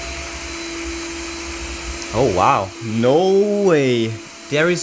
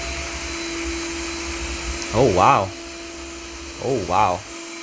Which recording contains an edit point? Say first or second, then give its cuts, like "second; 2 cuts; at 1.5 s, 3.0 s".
first; 1 cut; at 2.8 s